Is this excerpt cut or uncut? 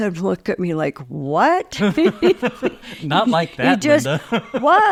uncut